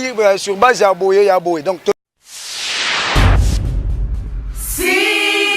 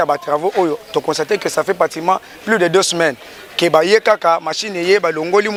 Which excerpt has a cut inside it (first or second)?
first